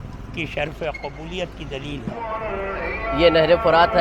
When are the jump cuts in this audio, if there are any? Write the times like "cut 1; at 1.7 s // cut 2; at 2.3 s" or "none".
cut 1; at 2.3 s